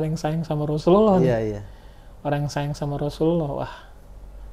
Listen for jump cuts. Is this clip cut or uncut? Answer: uncut